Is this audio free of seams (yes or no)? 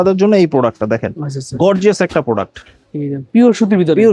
yes